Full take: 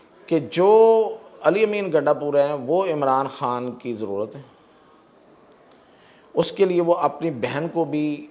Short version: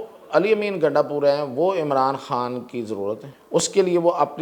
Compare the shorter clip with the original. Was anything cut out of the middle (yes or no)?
yes